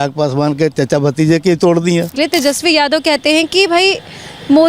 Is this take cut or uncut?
cut